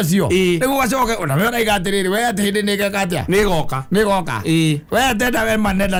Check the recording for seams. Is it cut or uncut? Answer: uncut